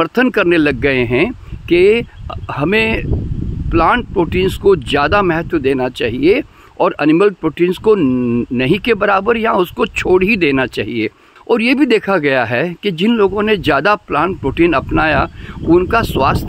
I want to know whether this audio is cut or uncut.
uncut